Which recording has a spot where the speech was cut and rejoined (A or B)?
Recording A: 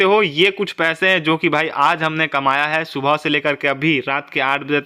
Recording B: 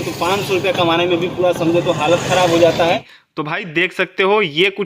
B